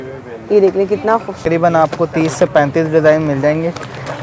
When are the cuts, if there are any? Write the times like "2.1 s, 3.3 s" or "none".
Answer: 1.4 s